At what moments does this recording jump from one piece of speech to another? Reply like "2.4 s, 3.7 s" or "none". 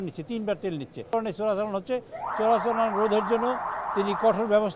1.1 s